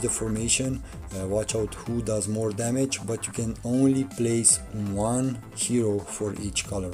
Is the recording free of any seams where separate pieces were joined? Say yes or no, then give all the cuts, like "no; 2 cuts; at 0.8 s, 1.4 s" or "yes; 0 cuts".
yes; 0 cuts